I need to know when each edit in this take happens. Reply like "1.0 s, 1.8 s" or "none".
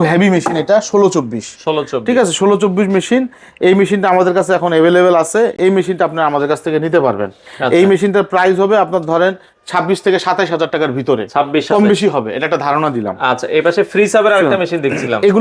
none

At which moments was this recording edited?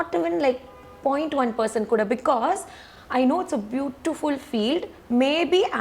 none

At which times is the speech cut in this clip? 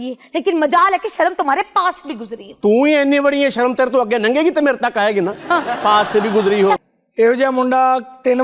6.8 s

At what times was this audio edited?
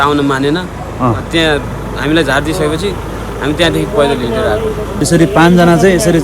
4.9 s

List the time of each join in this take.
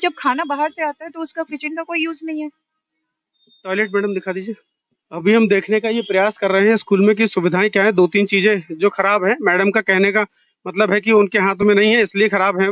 none

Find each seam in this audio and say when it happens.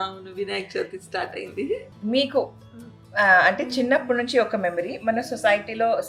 1.9 s

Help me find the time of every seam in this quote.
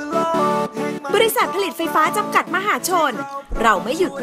1.0 s

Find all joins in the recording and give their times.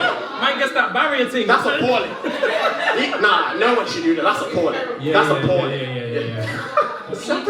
none

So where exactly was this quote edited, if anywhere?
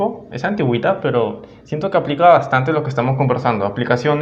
none

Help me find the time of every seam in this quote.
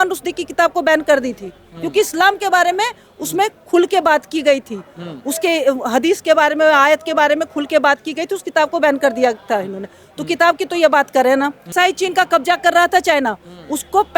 11.7 s

